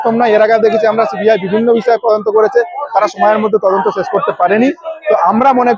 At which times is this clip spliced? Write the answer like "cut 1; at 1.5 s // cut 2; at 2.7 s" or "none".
none

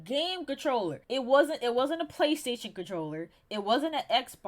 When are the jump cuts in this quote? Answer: cut 1; at 1.0 s

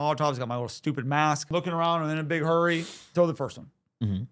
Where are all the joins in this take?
cut 1; at 1.5 s

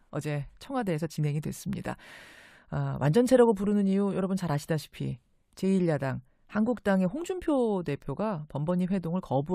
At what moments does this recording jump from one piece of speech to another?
none

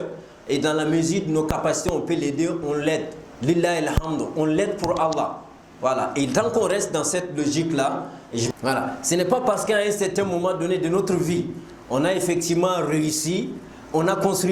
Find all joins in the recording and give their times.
cut 1; at 8.5 s

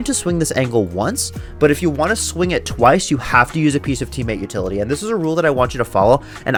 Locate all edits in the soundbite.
none

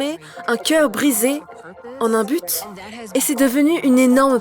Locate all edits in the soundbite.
cut 1; at 1.8 s // cut 2; at 3.0 s

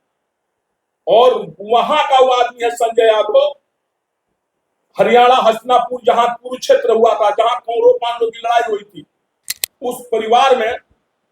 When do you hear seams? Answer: cut 1; at 9.7 s

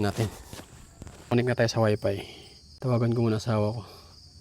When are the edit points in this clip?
cut 1; at 1.3 s

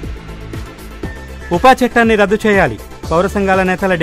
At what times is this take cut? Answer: none

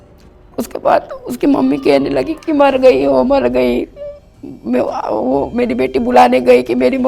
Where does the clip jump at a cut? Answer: none

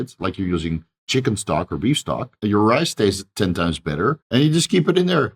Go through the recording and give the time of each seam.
cut 1; at 2.4 s // cut 2; at 4.2 s

